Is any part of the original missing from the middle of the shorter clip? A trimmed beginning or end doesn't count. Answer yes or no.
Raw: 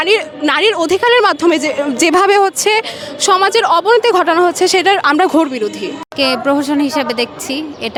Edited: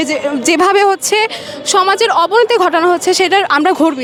no